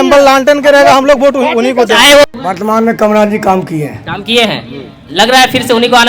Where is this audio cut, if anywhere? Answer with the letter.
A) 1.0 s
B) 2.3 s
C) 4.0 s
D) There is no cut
B